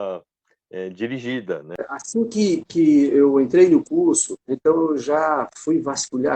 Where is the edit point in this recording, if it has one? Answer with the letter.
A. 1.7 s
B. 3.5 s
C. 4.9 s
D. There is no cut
A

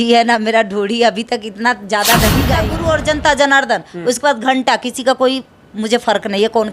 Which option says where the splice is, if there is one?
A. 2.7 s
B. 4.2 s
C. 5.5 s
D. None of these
A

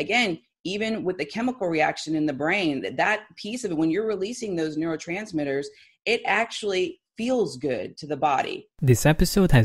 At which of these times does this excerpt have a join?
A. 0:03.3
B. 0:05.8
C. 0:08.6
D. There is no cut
C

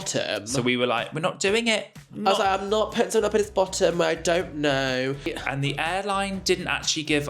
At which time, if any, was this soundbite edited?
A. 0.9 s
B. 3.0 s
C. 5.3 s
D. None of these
C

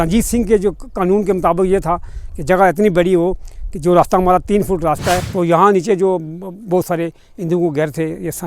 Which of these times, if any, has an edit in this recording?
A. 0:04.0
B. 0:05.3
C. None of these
B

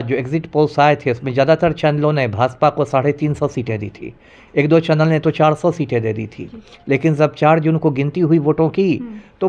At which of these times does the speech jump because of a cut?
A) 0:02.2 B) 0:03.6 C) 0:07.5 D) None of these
D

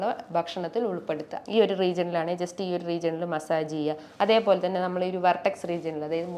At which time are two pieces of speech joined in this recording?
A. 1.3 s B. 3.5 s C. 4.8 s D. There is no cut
A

